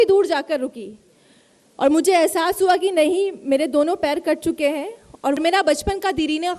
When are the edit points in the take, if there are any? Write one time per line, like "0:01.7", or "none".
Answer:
0:05.4